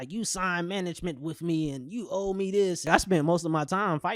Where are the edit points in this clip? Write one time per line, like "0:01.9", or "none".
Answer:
0:02.9